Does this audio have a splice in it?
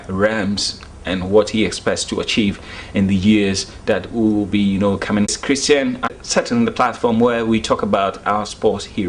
yes; 2 cuts; at 5.4 s, 6.2 s

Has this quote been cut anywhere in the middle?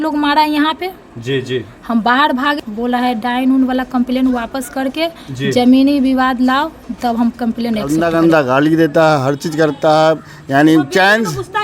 yes; 2 cuts; at 2.6 s, 7.9 s

